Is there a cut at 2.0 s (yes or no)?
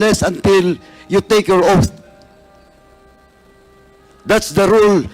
no